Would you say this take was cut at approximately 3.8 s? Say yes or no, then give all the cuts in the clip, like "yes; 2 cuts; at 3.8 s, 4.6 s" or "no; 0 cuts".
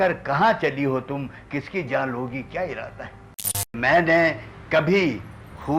yes; 1 cut; at 3.8 s